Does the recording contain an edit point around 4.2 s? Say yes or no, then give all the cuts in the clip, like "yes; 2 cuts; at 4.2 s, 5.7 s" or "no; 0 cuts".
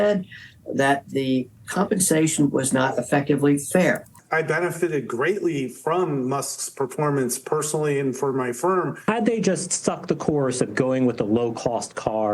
yes; 2 cuts; at 4.2 s, 8.9 s